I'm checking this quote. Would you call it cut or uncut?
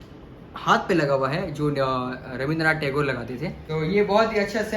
cut